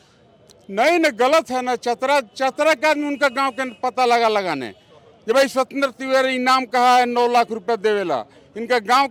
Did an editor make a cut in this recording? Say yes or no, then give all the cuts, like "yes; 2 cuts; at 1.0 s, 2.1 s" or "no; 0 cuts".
no; 0 cuts